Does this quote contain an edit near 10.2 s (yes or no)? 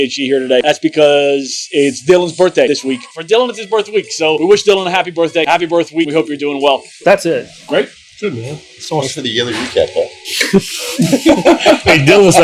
no